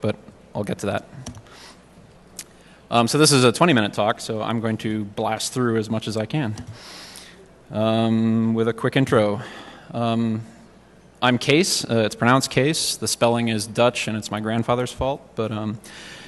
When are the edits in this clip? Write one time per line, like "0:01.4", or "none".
0:12.3